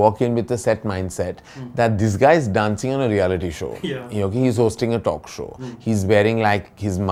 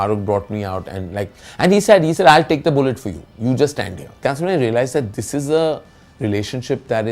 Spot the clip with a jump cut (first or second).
second